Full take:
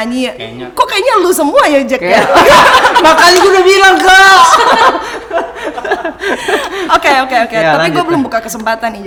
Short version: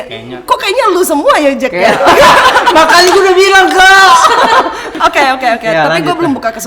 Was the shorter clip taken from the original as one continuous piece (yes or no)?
no